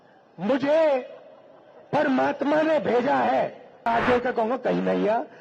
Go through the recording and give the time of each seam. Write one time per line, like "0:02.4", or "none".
0:03.9